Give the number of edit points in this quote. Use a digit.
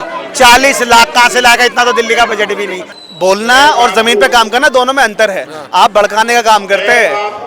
1